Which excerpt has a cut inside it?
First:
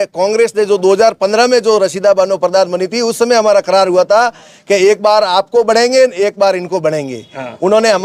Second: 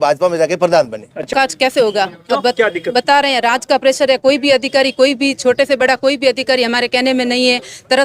second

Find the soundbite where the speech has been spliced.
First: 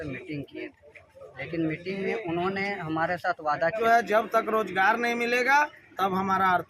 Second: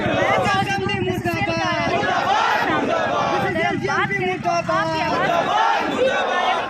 first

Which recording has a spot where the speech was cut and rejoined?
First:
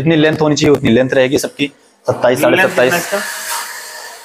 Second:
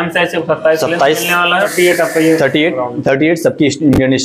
second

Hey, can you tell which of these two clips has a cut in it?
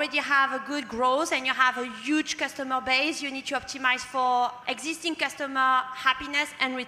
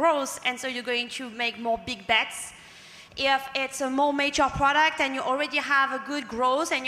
first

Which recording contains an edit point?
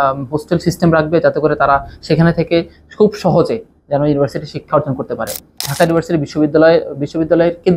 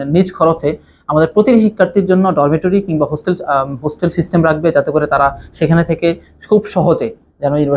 first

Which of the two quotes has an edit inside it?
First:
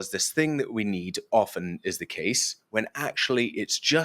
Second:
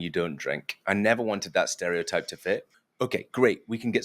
second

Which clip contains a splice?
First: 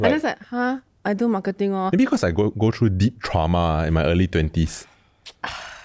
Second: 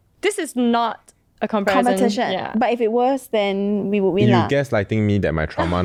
first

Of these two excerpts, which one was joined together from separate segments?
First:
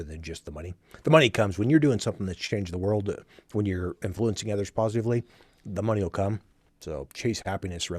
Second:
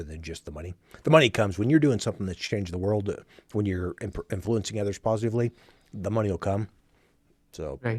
first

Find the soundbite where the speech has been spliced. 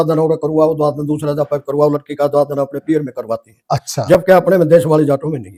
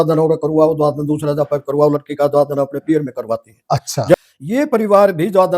second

